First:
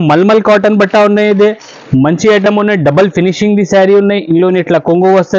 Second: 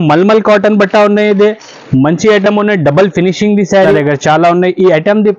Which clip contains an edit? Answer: second; 1 cut; at 3.9 s

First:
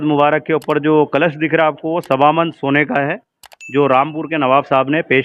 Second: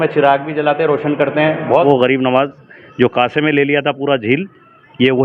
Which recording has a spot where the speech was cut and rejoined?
second; 1 cut; at 1.8 s

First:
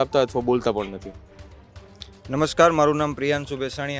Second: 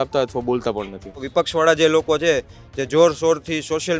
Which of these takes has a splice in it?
second; 1 cut; at 1.2 s

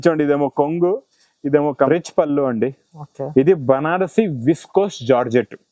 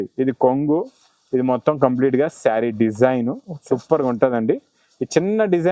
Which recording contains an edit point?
first; 1 cut; at 1.9 s

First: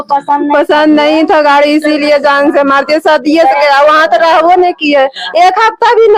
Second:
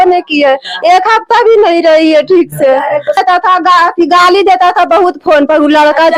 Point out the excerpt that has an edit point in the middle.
second; 1 cut; at 3.2 s

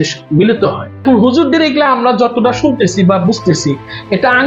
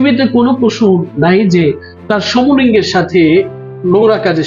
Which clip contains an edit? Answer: first; 1 cut; at 0.9 s

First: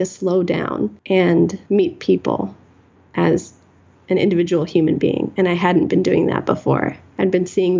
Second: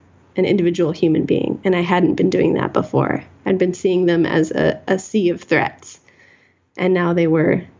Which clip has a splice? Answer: first; 2 cuts; at 1.0 s, 1.6 s

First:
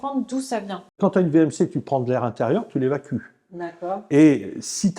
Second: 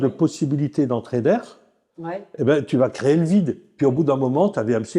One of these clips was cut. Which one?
first; 1 cut; at 0.9 s

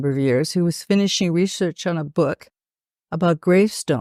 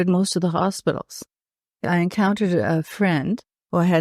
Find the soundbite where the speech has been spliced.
second; 1 cut; at 1.9 s

